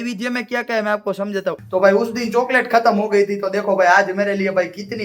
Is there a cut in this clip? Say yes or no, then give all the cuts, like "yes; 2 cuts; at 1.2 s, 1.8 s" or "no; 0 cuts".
yes; 1 cut; at 1.6 s